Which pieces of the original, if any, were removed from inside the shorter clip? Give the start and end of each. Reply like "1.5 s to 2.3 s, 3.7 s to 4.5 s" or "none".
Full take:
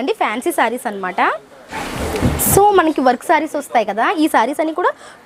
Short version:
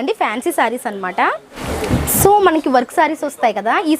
1.5 s to 1.8 s